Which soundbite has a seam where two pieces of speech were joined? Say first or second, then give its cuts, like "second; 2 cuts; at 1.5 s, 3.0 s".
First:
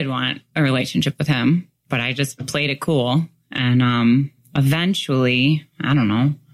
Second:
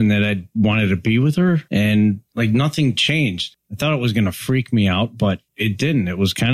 second; 4 cuts; at 1.6 s, 2.3 s, 3.4 s, 5.5 s